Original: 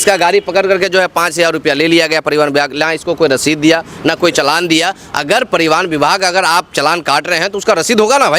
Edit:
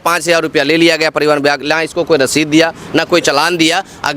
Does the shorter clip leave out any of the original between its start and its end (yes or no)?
no